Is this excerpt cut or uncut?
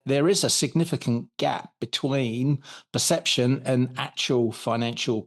uncut